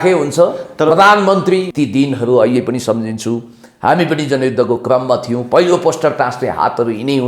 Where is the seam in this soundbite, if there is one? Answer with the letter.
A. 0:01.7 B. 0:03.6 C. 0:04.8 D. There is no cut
A